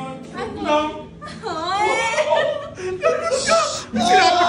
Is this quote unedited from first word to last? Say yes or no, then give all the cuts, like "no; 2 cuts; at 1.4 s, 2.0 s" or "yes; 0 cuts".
yes; 0 cuts